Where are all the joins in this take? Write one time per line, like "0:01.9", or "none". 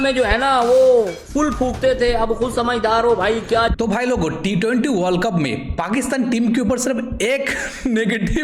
none

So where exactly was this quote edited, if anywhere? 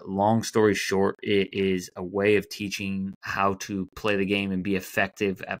0:03.2

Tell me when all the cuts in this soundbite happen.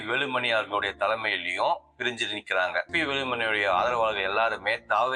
0:02.9

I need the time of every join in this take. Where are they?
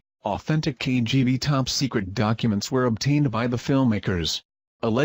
none

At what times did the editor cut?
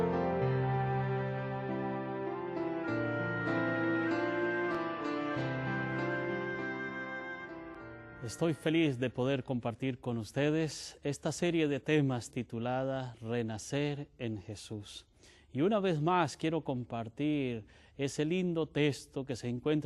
none

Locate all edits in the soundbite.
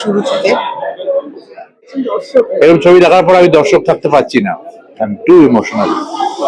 0:01.8

